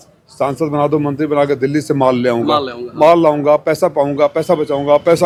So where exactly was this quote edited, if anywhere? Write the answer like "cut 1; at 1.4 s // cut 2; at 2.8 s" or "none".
none